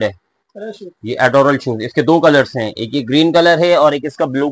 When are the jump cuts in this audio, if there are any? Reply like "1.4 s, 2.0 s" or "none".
none